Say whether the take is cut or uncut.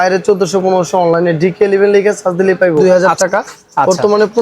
cut